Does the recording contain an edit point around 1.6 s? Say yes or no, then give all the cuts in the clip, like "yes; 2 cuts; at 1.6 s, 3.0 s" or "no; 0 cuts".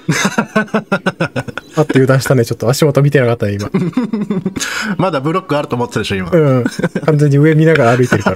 no; 0 cuts